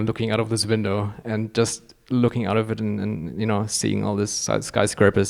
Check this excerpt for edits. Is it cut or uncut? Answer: uncut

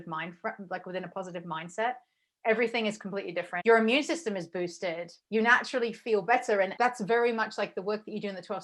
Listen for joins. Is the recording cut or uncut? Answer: cut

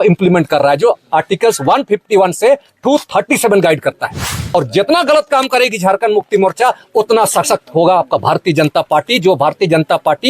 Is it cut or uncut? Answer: cut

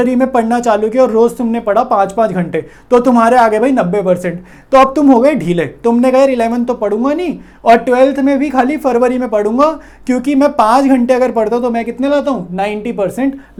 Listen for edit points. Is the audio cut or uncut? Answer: uncut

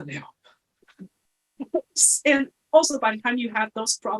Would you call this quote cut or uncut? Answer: uncut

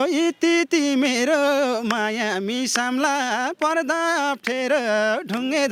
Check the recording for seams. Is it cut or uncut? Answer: uncut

